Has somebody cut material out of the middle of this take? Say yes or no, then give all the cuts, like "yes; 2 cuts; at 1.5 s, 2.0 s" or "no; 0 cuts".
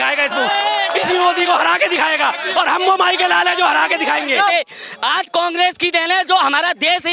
yes; 1 cut; at 4.5 s